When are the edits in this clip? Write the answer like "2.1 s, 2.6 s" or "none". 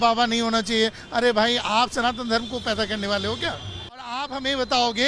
4.1 s